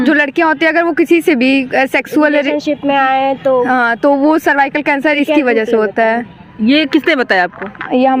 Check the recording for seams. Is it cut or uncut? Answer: uncut